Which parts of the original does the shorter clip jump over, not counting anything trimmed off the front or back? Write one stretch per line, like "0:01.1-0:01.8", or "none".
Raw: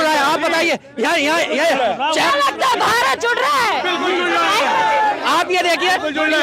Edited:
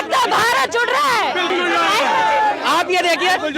0:04.0-0:04.1